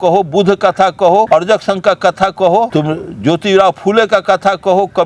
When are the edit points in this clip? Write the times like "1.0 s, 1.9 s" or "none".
1.3 s, 2.7 s